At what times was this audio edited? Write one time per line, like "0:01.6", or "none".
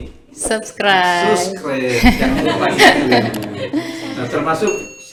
none